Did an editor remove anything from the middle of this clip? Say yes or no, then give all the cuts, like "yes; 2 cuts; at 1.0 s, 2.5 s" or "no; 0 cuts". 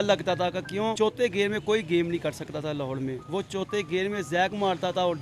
yes; 1 cut; at 0.9 s